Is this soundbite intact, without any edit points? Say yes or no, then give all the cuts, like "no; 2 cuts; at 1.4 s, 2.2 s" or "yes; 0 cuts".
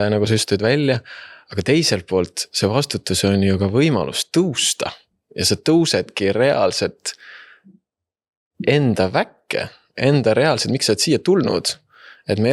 yes; 0 cuts